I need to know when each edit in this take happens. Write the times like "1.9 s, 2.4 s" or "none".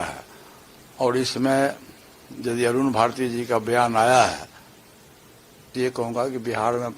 5.7 s